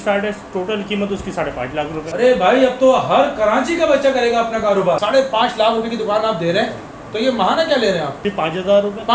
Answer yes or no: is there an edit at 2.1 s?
yes